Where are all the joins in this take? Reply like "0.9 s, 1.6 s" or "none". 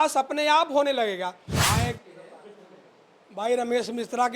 1.5 s